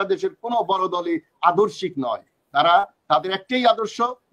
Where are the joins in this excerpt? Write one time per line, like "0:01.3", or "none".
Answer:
none